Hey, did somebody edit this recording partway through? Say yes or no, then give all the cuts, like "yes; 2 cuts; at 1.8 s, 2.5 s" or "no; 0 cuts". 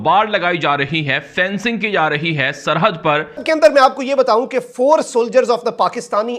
yes; 1 cut; at 3.4 s